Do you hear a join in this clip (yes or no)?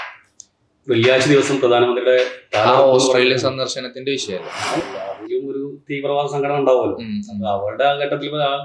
yes